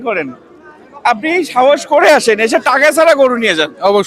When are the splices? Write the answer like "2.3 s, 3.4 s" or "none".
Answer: none